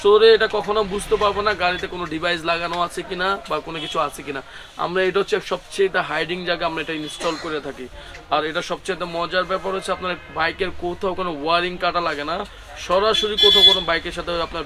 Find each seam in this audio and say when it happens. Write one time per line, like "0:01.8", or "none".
none